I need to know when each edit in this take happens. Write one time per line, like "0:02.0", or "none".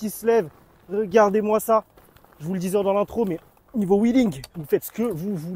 none